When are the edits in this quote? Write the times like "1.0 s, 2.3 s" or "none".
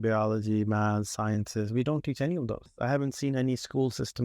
2.7 s